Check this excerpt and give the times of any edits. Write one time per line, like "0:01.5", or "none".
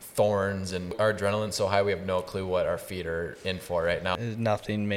0:00.9
0:04.1

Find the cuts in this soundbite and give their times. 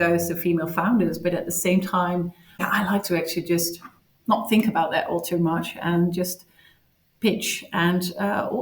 0:02.6

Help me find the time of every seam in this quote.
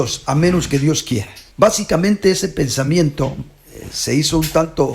0:01.4

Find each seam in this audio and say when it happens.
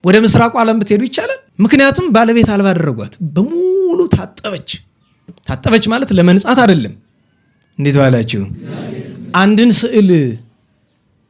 0:01.4

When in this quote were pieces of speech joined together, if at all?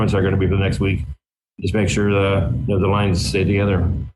0:03.3

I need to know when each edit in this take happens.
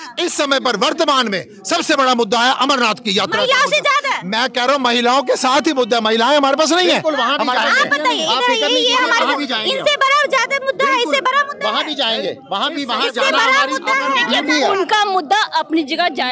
none

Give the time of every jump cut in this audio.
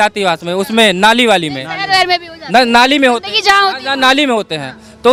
none

